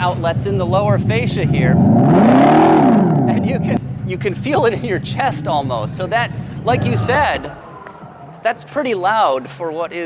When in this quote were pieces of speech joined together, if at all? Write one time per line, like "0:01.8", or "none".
0:03.9